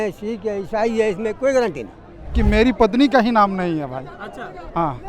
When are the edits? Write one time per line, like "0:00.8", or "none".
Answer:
0:02.3